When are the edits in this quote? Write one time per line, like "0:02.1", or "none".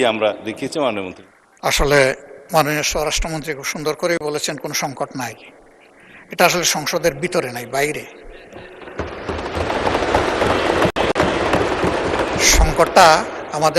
0:01.1